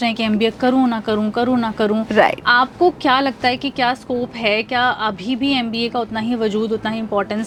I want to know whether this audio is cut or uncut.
uncut